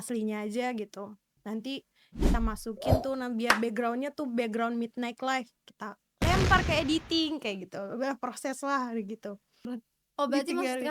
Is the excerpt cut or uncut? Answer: cut